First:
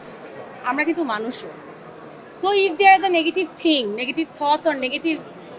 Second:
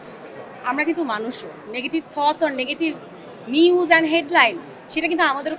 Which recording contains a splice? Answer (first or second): second